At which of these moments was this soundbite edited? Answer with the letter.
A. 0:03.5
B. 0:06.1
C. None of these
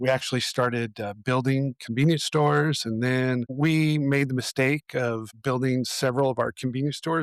A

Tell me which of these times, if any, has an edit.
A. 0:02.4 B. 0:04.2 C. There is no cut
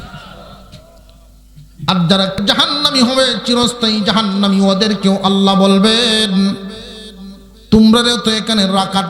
A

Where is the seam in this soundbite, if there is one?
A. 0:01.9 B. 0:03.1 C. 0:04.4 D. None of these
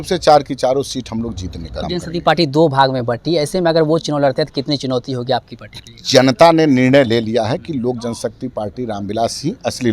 A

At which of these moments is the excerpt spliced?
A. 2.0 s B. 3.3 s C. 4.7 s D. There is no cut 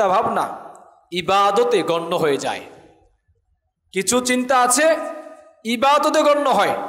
D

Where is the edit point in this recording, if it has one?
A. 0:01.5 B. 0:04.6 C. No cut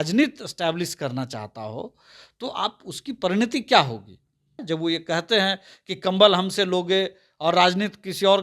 B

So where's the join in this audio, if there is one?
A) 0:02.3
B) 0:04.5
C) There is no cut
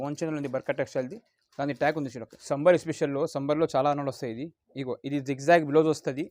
A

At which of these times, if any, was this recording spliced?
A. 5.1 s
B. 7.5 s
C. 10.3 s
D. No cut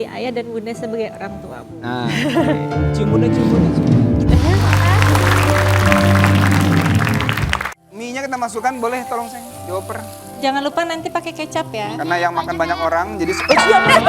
B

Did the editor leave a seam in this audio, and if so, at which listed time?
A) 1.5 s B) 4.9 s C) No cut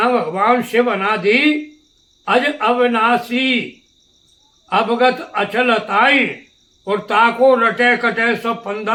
C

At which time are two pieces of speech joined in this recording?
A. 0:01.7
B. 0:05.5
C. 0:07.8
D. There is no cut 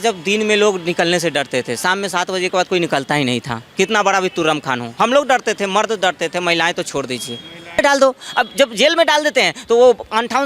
C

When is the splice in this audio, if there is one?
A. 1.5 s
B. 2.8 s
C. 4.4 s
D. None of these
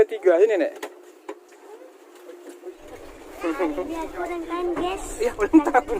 B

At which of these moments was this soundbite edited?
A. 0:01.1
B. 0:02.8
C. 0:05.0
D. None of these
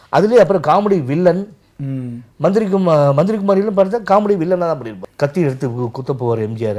C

